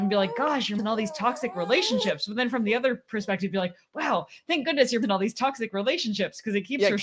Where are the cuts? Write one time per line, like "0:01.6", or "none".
0:00.8
0:05.0

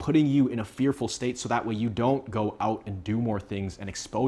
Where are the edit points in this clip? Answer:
none

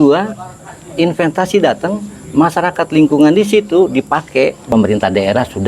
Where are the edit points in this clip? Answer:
0:04.6

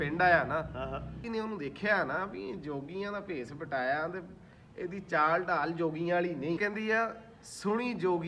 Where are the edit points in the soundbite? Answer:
0:01.2
0:06.6

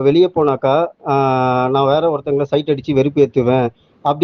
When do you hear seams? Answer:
none

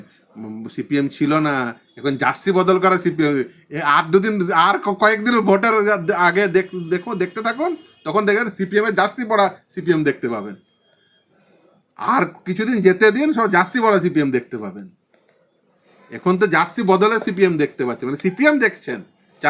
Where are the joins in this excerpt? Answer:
none

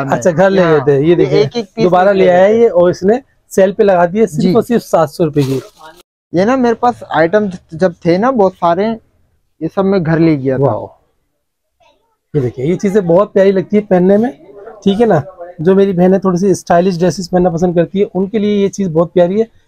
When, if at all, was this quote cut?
none

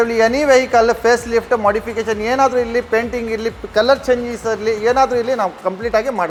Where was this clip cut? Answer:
none

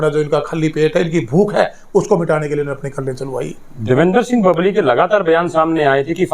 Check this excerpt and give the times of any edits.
none

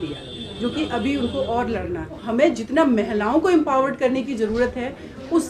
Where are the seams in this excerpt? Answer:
0:02.2

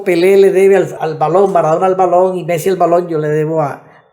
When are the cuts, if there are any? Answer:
0:00.9

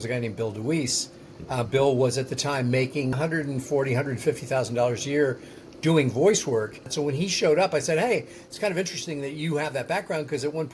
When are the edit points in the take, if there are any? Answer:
0:03.2
0:06.9

